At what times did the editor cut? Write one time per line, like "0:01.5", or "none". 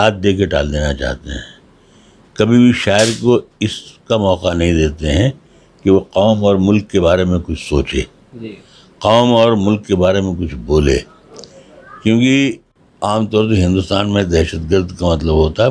0:12.7